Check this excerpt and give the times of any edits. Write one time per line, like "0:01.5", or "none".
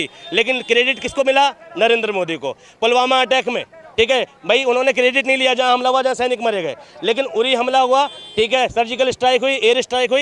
none